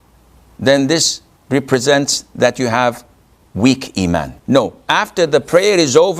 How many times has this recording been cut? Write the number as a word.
one